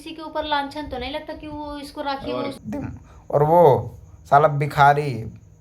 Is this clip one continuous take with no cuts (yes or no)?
no